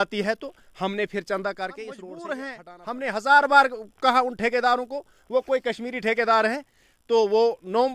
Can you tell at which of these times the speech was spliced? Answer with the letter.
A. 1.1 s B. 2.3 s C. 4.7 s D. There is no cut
B